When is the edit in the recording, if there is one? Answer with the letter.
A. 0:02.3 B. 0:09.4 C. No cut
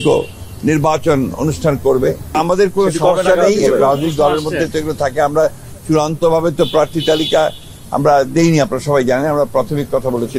A